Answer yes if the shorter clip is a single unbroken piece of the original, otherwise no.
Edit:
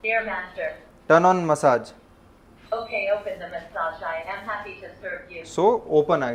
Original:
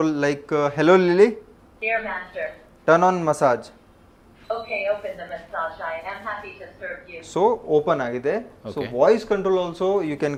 yes